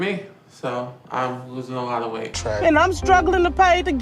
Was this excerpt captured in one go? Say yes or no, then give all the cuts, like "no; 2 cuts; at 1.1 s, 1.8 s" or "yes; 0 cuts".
no; 1 cut; at 2.4 s